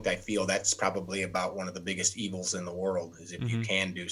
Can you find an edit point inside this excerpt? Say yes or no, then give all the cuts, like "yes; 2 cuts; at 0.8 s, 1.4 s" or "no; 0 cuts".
no; 0 cuts